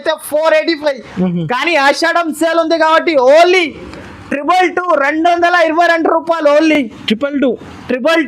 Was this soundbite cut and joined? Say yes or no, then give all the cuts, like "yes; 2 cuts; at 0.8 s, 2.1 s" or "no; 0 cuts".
no; 0 cuts